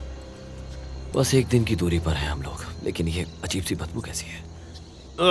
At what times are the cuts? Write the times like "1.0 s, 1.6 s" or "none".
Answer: 1.1 s